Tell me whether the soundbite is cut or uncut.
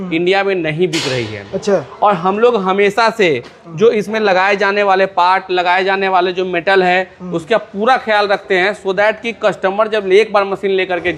uncut